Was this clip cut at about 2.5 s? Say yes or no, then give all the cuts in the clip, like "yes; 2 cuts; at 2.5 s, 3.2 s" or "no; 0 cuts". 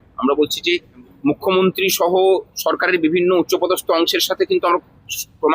no; 1 cut; at 1.1 s